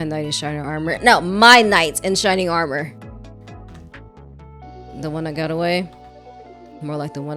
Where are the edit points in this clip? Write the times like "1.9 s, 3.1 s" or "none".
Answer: none